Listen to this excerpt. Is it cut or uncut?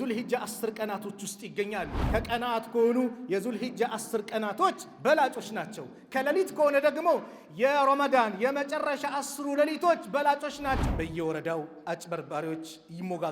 cut